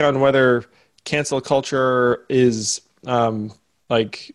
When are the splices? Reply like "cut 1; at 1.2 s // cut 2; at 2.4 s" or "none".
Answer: none